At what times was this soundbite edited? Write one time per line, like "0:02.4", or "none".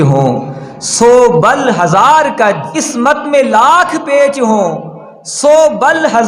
0:02.8

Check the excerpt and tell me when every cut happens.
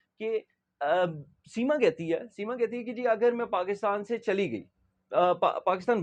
none

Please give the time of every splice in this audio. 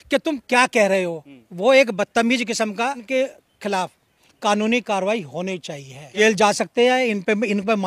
0:03.0
0:06.1

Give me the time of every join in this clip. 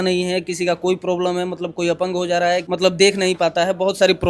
0:02.7

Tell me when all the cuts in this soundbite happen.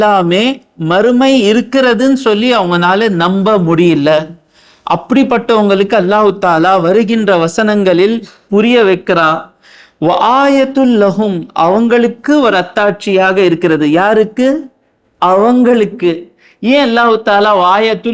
none

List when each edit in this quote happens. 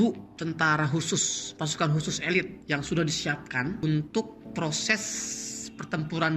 0:02.6
0:03.8
0:04.4

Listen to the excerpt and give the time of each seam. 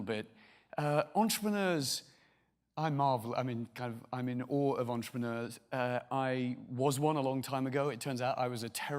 0:04.0

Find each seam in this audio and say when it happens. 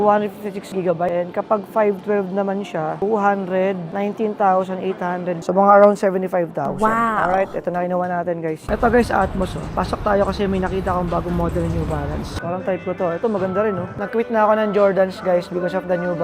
0:01.1
0:05.4
0:08.6
0:12.4
0:13.9

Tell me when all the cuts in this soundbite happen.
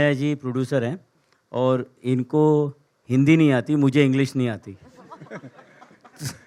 none

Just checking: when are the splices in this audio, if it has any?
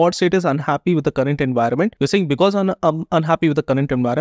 0:01.9

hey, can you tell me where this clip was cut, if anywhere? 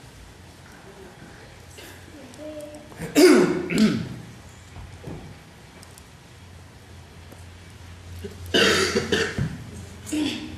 0:05.5

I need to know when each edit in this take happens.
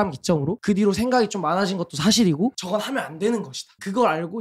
0:02.5

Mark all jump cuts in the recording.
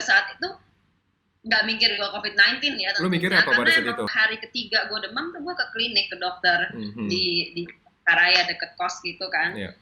0:04.1

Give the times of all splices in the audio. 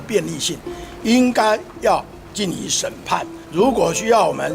0:03.4

